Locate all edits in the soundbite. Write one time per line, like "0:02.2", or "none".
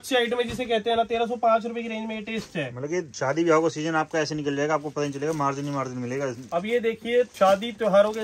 0:03.1
0:06.4
0:07.3